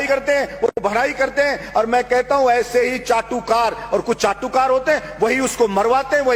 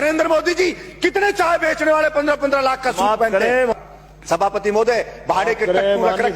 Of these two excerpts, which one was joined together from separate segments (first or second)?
second